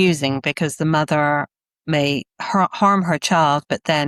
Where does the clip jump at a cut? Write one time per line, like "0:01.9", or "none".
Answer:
none